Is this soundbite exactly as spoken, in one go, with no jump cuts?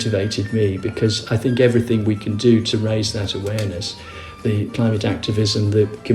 yes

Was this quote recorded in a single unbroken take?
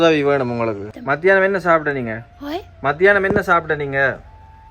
no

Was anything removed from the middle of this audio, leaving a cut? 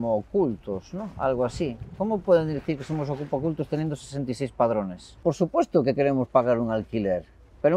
yes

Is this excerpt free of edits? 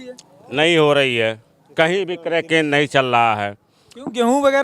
yes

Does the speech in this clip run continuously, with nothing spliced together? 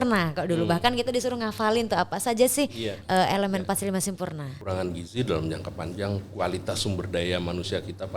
no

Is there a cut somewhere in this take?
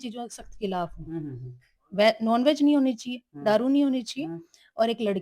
no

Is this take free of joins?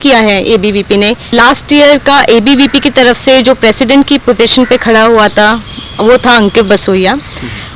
no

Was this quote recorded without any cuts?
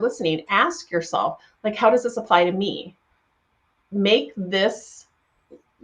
yes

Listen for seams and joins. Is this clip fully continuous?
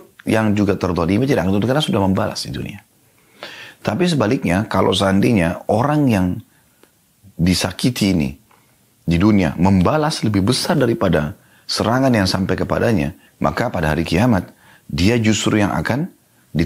no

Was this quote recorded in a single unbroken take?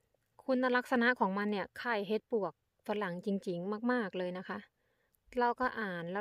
yes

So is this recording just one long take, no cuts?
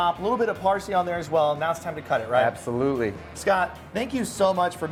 yes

